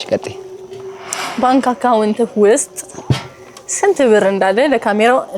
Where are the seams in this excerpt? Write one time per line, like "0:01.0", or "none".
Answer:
0:01.1